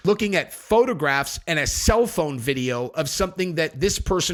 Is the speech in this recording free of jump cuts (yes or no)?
yes